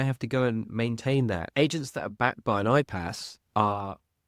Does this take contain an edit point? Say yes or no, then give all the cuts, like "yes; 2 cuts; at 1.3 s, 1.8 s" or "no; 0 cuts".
yes; 1 cut; at 1.5 s